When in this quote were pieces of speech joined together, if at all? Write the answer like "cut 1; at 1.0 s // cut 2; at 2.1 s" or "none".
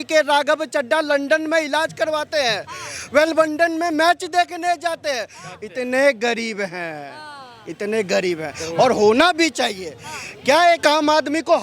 none